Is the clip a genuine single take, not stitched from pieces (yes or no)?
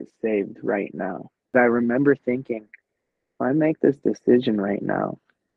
no